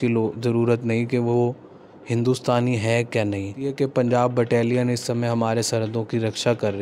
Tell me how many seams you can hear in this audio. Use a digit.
1